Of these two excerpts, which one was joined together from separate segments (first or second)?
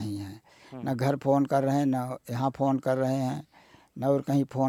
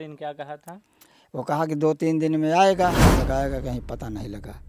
second